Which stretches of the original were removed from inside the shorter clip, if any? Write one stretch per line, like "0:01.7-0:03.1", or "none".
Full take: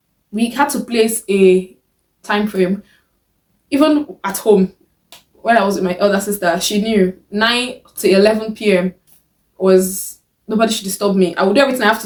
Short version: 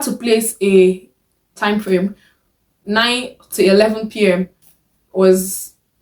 0:03.4-0:07.2